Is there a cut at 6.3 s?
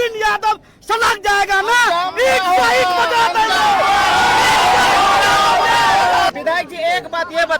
yes; 1 cut; at 6.3 s

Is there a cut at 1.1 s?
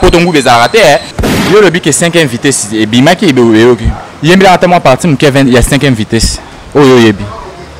yes; 1 cut; at 1.1 s

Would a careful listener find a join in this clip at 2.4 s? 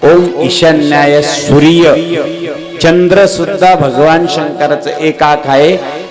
no; 0 cuts

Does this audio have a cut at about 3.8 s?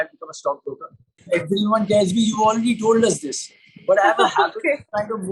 no; 1 cut; at 1.2 s

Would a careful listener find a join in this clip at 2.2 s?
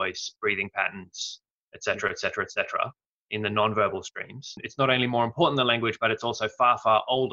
no; 1 cut; at 4.6 s

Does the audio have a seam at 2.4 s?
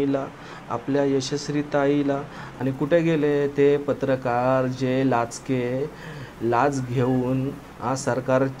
yes; 1 cut; at 2.4 s

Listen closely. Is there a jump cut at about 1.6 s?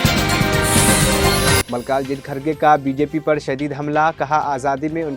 yes; 1 cut; at 1.6 s

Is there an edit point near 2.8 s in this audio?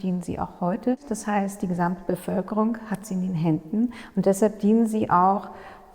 no; 1 cut; at 1.1 s

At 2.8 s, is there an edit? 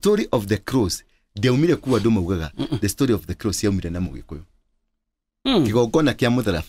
no; 1 cut; at 5.3 s

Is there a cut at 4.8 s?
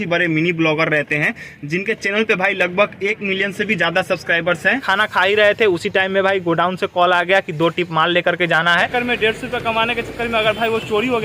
yes; 2 cuts; at 4.8 s, 8.9 s

